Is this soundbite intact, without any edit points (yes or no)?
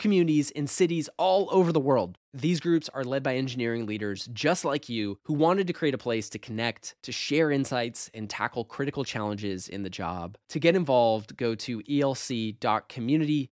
yes